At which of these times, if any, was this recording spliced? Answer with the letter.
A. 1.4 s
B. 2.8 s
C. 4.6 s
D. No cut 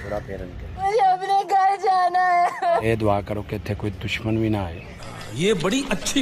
B